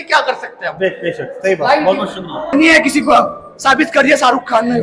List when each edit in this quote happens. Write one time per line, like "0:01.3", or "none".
0:02.3

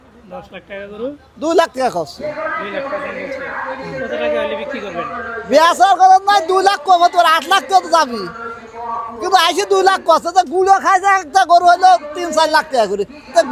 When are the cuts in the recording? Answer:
none

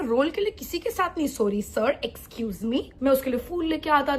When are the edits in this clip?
0:03.0

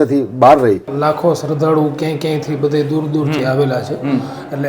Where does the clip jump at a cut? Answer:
0:00.9

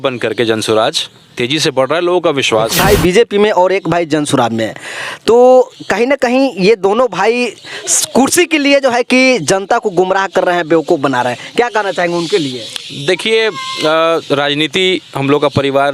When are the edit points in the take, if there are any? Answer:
0:02.7

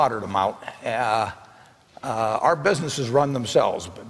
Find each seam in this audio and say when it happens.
none

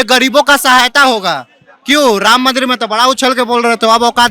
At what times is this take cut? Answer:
none

